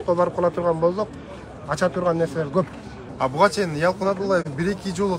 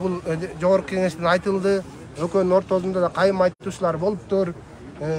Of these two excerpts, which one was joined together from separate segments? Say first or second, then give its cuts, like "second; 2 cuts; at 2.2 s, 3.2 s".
first; 1 cut; at 3.0 s